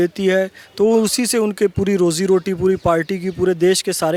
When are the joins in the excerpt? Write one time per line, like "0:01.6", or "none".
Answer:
none